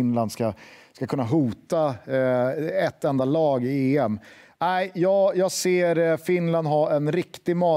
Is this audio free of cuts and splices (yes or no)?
yes